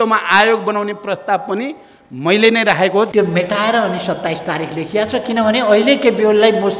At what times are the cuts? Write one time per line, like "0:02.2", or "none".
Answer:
0:03.1